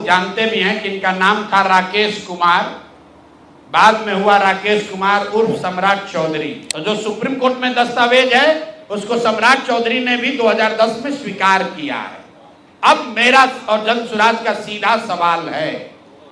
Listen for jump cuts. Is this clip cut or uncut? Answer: cut